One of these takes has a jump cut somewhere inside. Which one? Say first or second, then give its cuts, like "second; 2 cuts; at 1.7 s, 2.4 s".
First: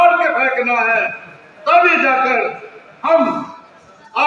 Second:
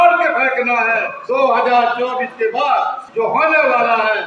second; 2 cuts; at 1.2 s, 3.0 s